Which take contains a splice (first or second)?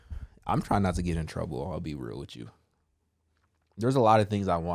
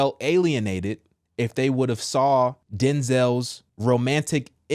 second